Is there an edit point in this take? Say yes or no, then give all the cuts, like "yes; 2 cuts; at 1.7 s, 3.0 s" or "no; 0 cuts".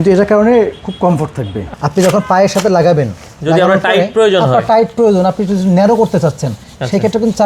yes; 1 cut; at 1.7 s